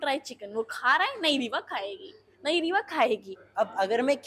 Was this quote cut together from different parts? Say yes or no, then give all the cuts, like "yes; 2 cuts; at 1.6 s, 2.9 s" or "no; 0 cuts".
yes; 1 cut; at 3.4 s